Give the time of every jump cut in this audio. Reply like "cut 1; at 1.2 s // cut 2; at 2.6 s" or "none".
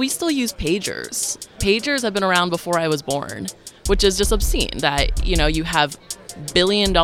cut 1; at 1.4 s